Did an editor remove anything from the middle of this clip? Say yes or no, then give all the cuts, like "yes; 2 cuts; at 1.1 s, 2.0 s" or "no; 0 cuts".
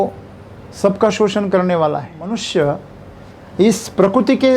yes; 1 cut; at 2.3 s